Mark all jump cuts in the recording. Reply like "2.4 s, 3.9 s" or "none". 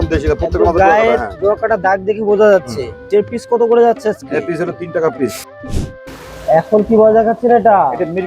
3.1 s, 5.4 s

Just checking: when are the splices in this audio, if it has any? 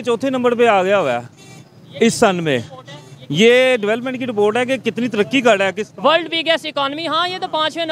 none

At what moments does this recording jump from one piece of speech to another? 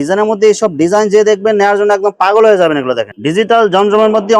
3.1 s

